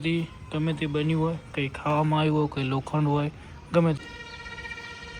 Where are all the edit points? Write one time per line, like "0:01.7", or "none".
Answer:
0:04.0